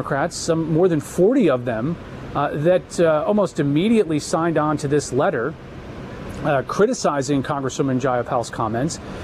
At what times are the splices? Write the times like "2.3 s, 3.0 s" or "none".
none